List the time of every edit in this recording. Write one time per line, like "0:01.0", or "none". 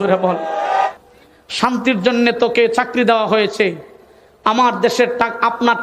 0:00.9